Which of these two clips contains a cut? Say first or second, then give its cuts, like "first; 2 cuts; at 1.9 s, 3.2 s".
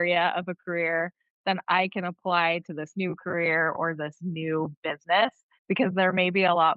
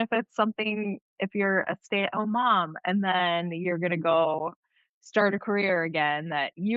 first; 1 cut; at 5.5 s